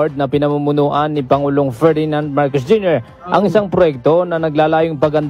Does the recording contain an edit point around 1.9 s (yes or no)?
no